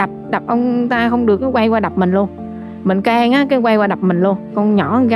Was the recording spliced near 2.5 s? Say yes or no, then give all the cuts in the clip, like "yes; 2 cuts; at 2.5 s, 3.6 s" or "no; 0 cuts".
no; 0 cuts